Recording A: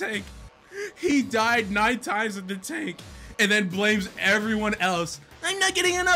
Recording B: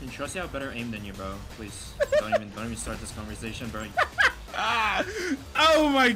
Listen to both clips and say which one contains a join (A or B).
B